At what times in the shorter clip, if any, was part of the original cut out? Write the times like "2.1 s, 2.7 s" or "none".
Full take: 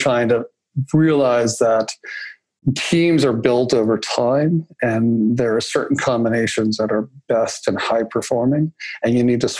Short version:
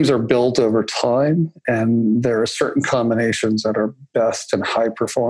none